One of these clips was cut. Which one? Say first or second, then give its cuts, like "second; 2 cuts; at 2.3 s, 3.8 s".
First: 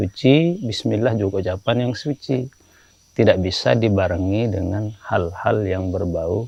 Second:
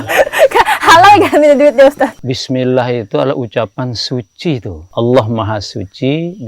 second; 2 cuts; at 2.2 s, 4.8 s